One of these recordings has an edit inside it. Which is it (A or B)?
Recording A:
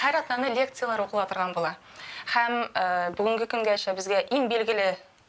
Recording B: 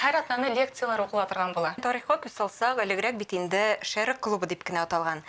B